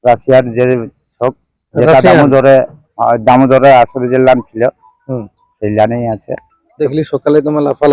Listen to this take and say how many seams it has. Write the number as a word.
one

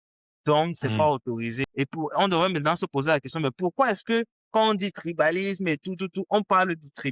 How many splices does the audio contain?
one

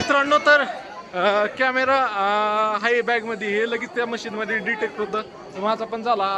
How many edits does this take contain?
zero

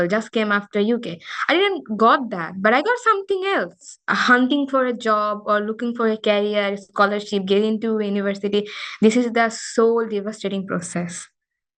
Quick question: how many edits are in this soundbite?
one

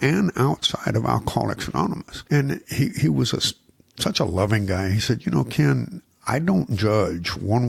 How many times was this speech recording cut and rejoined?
one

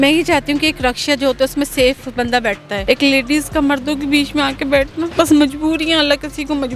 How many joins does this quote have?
two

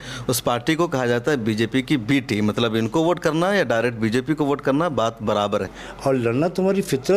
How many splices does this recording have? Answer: one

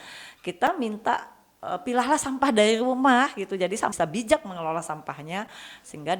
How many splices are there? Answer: one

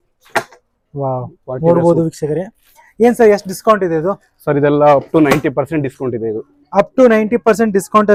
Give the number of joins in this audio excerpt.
zero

